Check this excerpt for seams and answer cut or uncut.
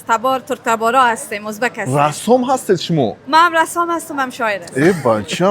cut